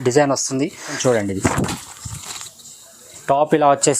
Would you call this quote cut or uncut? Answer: cut